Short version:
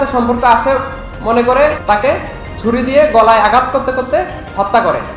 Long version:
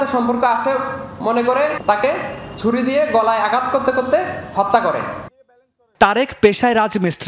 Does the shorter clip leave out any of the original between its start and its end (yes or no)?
no